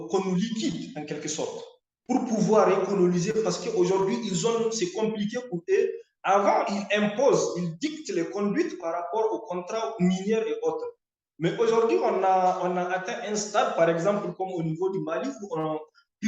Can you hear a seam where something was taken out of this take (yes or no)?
no